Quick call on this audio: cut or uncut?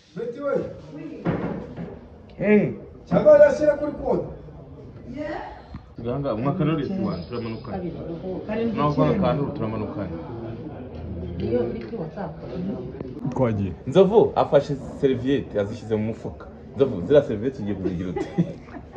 cut